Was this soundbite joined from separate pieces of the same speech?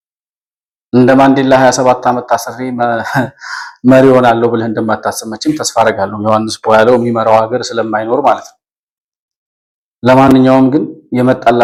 no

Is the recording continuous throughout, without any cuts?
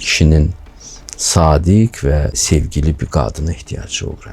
no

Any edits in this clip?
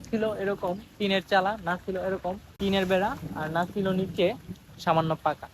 yes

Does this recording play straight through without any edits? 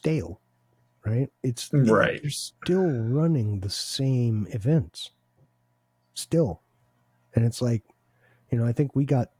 yes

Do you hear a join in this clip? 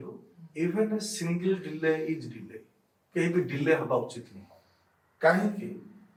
no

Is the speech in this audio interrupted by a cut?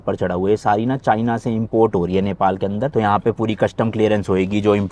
no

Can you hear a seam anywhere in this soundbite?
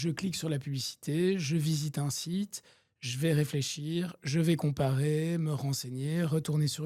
no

